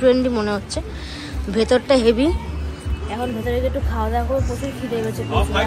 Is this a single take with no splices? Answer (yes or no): yes